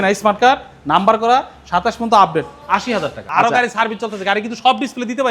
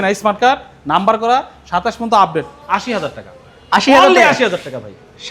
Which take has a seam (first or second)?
first